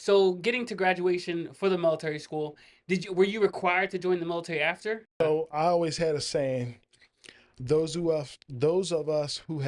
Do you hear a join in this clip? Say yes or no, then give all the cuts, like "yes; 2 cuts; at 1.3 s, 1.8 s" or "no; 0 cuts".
yes; 1 cut; at 5.2 s